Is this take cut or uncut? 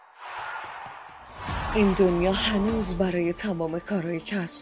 uncut